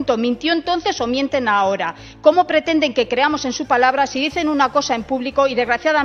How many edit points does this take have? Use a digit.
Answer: 0